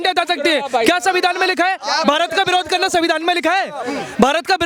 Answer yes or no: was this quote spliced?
no